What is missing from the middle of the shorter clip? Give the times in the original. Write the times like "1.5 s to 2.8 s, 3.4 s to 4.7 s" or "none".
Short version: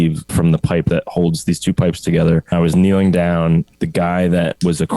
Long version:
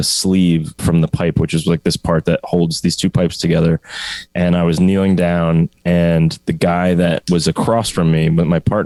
1.4 s to 2.2 s, 3.9 s to 4.6 s, 5.8 s to 6.4 s